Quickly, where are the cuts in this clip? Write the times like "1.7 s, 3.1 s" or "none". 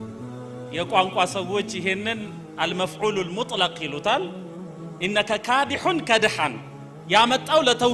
none